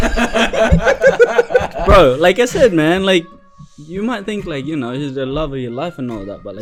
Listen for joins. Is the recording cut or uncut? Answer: uncut